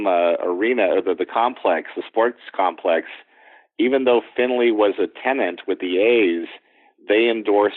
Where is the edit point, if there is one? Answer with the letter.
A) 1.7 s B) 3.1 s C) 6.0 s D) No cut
D